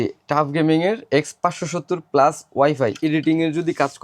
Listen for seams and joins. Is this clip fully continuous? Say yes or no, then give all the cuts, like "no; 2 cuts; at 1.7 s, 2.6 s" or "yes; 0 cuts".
no; 1 cut; at 3.0 s